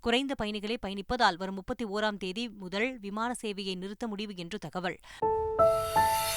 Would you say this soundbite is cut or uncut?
cut